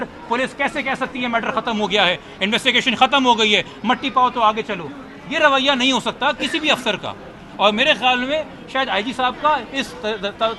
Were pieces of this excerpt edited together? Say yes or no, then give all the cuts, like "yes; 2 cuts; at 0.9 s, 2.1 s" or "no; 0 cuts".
no; 0 cuts